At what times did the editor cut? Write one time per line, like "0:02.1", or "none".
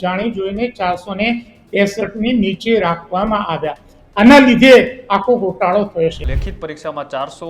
0:06.2